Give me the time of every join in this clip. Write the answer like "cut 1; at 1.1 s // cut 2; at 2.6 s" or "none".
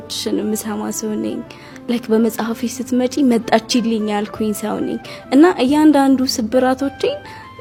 none